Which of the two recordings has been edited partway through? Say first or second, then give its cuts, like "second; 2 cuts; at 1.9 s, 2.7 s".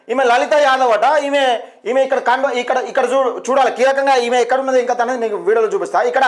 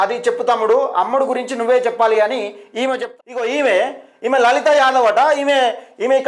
second; 1 cut; at 3.1 s